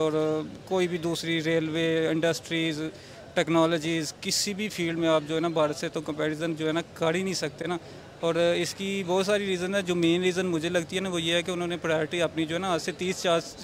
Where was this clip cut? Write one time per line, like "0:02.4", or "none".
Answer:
none